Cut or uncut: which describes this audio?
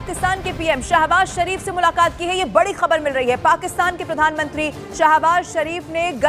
uncut